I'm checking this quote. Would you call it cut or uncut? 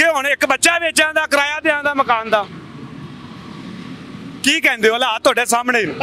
uncut